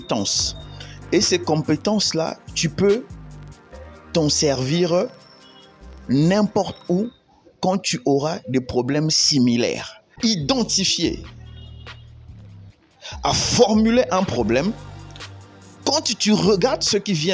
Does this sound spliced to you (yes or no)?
yes